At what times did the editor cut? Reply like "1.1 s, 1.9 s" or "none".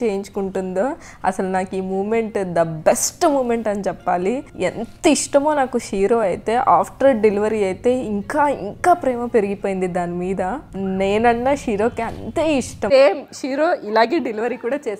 12.9 s